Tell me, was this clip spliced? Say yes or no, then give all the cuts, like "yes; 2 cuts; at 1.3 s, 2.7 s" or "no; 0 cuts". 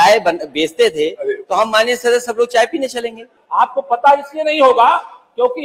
yes; 1 cut; at 3.3 s